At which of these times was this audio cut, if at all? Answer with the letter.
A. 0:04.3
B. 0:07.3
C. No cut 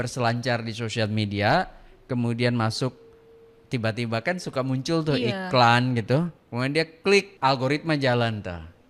B